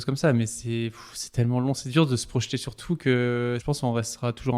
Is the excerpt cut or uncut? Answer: cut